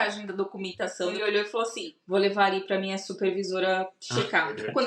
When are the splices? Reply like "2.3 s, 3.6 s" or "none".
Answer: 1.2 s